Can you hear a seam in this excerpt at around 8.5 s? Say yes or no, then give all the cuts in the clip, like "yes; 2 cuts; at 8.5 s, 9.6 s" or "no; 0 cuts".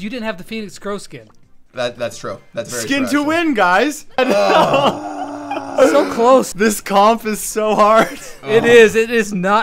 no; 2 cuts; at 4.2 s, 6.5 s